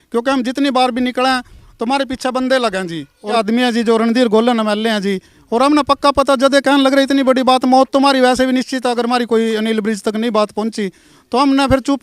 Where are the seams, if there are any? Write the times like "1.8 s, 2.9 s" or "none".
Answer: 3.4 s